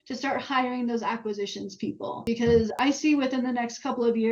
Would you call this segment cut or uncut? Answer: cut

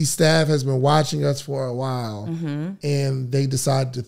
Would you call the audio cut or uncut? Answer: uncut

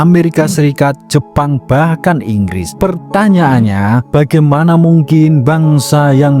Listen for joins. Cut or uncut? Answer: uncut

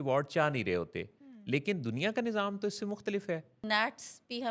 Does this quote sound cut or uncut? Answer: cut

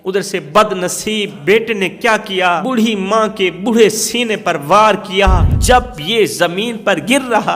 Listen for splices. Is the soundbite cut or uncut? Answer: cut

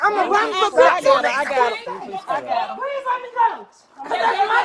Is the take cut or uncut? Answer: uncut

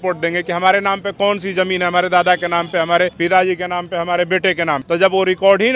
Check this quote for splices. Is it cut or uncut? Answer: cut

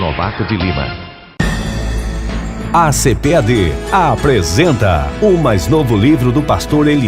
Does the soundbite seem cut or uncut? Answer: cut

